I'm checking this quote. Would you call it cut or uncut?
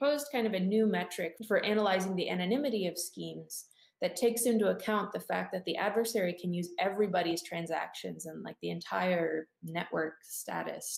cut